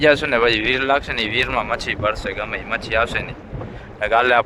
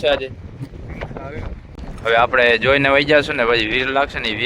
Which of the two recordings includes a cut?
second; 1 cut; at 1.8 s

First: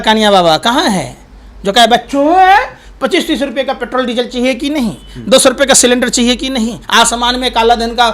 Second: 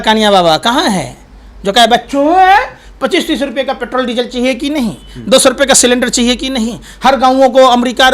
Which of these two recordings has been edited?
first; 1 cut; at 6.8 s

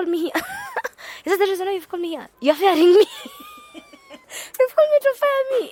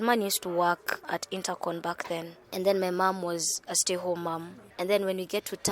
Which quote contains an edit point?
second; 2 cuts; at 1.0 s, 4.6 s

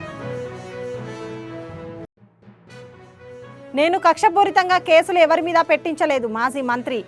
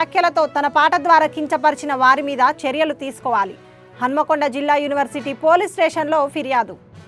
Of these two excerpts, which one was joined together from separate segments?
first; 2 cuts; at 2.0 s, 3.1 s

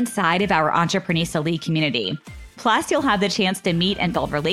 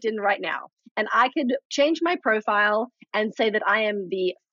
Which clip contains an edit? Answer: second; 1 cut; at 1.7 s

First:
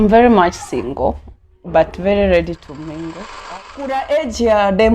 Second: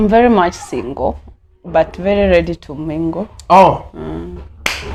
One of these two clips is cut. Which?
first; 1 cut; at 3.4 s

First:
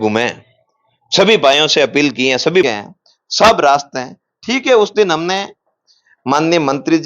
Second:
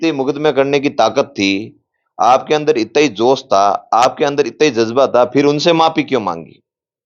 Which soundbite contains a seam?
first; 1 cut; at 2.6 s

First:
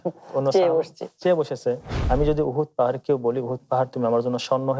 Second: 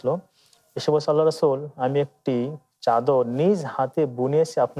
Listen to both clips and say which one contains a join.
first; 1 cut; at 1.9 s

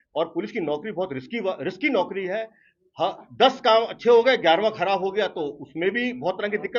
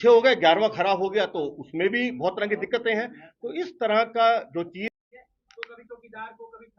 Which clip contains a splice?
second; 1 cut; at 5.0 s

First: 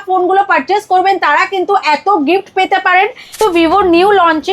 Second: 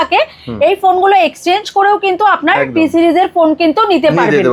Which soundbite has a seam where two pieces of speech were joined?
first; 1 cut; at 3.4 s

